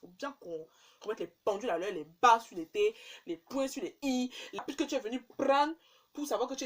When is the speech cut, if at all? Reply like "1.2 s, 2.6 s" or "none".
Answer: 4.6 s